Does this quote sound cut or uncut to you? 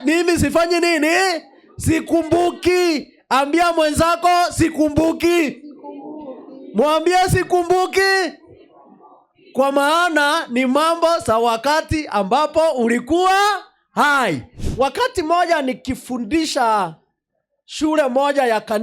cut